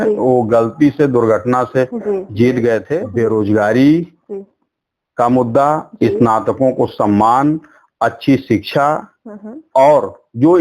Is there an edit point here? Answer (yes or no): yes